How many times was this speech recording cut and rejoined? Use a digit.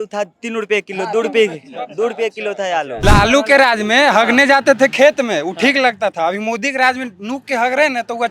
1